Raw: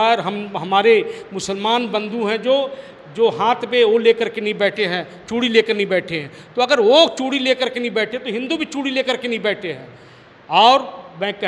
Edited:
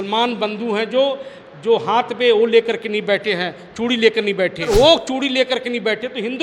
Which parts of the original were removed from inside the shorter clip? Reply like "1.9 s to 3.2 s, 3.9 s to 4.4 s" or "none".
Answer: 6.2 s to 6.8 s